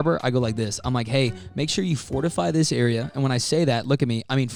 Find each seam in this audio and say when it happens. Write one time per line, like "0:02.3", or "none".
none